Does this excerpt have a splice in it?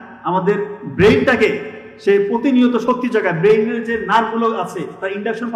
no; 0 cuts

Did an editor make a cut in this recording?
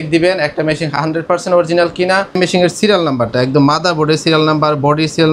yes; 1 cut; at 2.4 s

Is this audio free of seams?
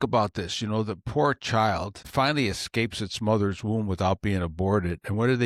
yes; 0 cuts

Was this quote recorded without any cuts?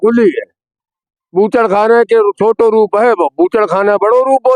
yes; 0 cuts

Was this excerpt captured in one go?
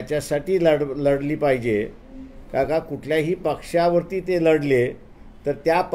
yes; 0 cuts

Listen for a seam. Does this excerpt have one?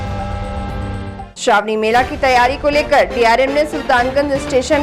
yes; 1 cut; at 1.3 s

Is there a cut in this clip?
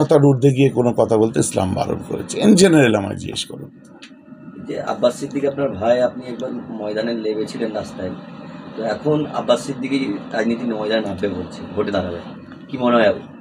no; 0 cuts

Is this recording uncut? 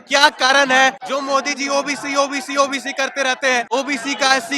no; 2 cuts; at 1.0 s, 3.7 s

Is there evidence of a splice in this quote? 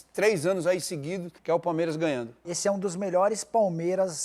yes; 2 cuts; at 1.3 s, 2.5 s

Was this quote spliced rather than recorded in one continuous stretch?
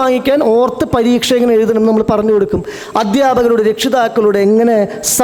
no; 0 cuts

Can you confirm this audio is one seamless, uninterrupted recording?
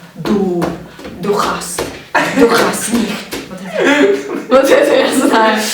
yes; 0 cuts

